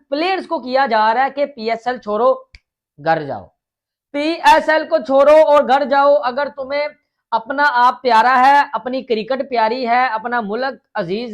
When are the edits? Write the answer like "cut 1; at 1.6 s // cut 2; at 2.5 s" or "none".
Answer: none